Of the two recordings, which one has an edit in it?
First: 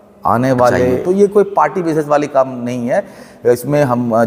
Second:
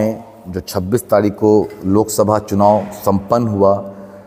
first; 1 cut; at 1.0 s

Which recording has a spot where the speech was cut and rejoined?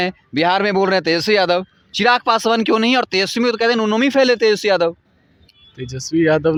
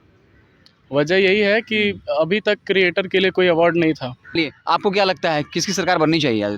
second; 1 cut; at 4.4 s

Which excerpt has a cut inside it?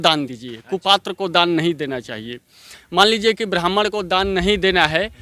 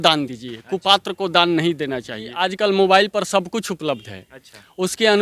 second; 1 cut; at 2.4 s

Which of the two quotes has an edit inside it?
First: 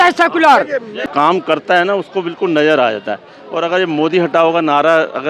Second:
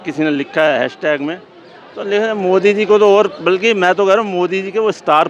first; 1 cut; at 1.1 s

